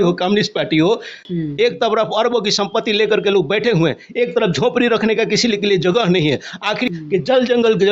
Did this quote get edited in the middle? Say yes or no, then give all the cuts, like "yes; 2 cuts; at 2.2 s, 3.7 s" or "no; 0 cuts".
yes; 2 cuts; at 1.2 s, 6.9 s